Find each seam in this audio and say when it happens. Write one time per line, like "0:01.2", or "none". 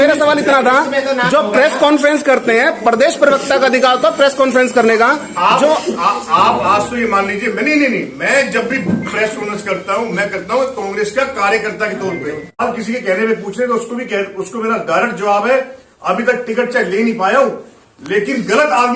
0:12.6

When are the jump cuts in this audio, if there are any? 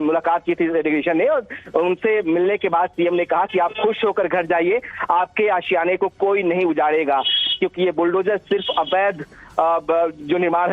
0:09.8

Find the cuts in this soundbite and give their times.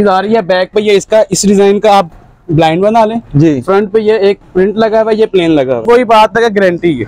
0:05.8

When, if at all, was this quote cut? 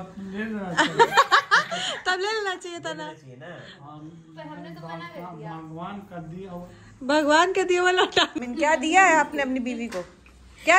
0:08.3

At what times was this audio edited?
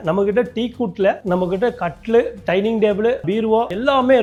none

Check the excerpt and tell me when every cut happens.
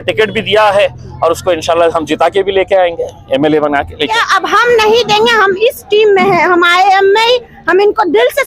0:04.1

